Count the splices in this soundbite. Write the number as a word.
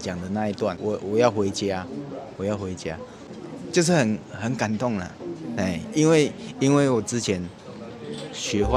two